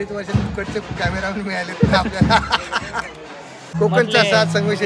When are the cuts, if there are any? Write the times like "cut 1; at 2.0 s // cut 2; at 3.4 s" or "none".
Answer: cut 1; at 3.6 s